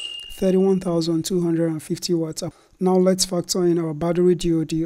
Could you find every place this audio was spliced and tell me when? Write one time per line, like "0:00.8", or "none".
0:02.4